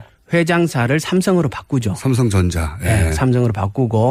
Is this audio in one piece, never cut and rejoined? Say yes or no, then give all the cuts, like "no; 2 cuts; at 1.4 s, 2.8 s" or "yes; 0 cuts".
yes; 0 cuts